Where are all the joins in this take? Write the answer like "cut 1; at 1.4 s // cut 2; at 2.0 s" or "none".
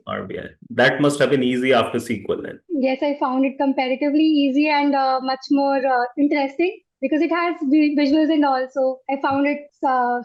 none